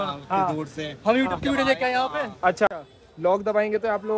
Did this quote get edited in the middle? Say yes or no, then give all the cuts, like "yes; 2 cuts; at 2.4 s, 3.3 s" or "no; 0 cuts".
yes; 1 cut; at 2.8 s